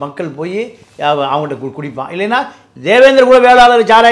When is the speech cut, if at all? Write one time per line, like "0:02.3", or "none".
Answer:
0:02.6